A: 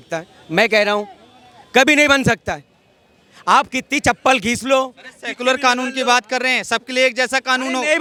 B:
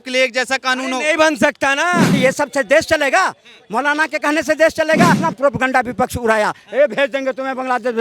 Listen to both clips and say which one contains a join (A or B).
B